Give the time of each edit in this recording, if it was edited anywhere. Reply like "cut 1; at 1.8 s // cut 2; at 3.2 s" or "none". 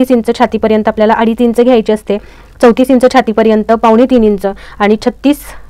none